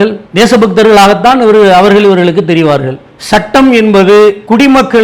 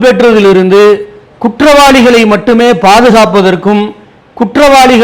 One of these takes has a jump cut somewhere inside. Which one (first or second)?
first